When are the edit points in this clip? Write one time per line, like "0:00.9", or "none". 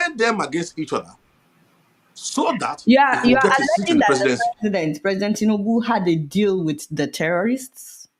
none